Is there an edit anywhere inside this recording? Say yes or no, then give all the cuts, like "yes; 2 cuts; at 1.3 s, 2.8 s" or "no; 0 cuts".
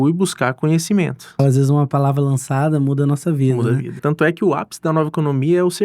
yes; 2 cuts; at 1.4 s, 4.0 s